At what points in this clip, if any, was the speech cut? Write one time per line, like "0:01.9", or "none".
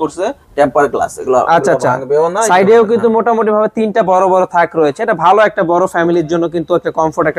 none